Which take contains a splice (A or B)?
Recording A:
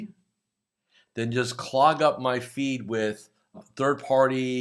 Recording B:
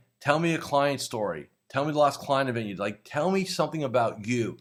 A